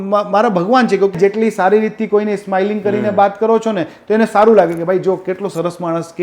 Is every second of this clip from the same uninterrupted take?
no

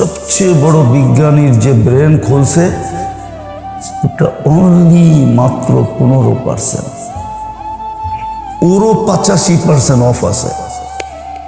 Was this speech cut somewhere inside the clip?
no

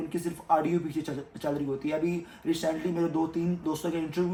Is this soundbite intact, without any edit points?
yes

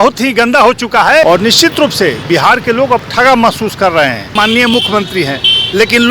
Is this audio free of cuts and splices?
no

